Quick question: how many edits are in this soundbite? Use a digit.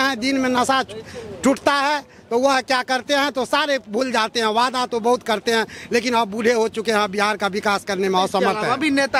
0